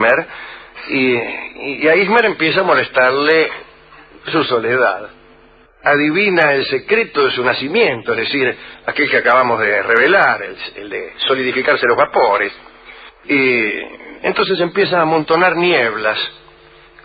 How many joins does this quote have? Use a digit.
1